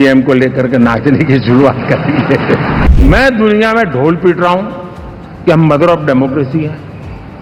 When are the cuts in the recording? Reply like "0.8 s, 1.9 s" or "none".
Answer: 2.9 s